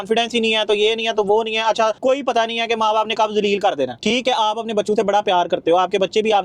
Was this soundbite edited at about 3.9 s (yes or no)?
yes